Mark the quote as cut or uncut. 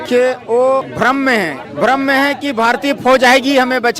cut